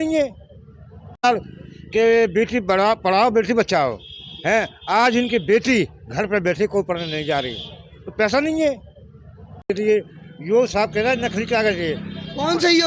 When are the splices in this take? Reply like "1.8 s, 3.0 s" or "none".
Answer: 1.2 s, 9.7 s